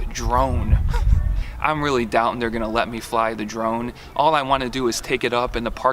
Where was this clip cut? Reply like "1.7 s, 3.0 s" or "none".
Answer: 1.4 s